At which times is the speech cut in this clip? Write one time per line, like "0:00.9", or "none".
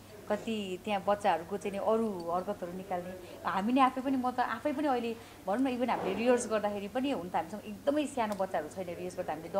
none